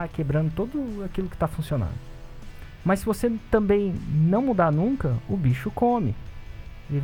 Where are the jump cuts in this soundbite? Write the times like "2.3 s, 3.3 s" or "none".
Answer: none